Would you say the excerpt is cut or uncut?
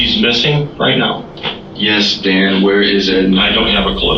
uncut